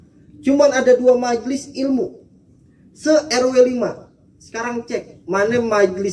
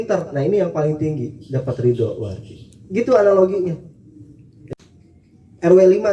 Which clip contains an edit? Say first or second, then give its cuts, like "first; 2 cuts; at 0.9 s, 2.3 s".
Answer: second; 1 cut; at 4.5 s